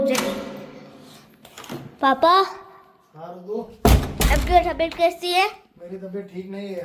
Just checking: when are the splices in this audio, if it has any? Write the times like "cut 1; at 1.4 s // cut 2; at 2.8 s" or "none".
none